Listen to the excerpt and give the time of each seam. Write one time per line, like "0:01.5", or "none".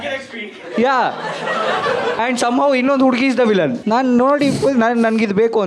0:02.2
0:03.8